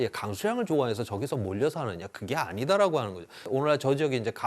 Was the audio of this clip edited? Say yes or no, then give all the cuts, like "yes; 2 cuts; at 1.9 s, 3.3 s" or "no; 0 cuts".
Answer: yes; 1 cut; at 3.3 s